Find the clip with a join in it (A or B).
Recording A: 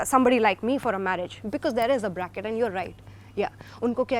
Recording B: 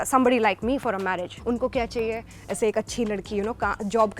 B